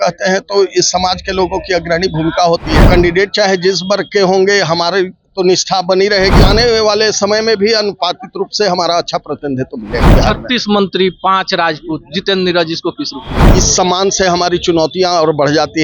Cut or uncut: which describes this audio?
cut